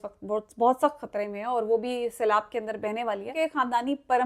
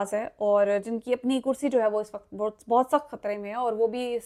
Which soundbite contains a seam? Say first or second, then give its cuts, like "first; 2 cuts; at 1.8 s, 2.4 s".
first; 1 cut; at 3.3 s